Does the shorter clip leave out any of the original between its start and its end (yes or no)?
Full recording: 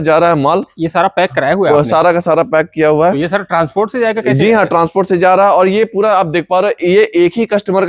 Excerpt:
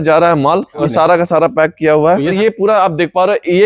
yes